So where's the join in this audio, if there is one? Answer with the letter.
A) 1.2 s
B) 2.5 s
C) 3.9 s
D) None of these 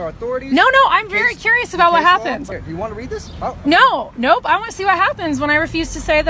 B